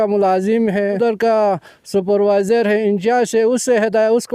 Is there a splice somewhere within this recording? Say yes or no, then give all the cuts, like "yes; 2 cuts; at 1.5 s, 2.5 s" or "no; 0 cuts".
yes; 1 cut; at 1.0 s